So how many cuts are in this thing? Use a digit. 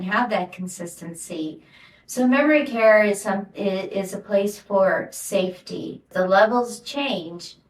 1